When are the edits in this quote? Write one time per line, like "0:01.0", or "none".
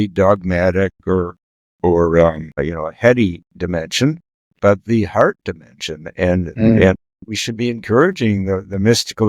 0:02.5